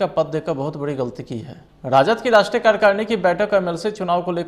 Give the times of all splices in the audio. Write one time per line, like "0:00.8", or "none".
0:01.9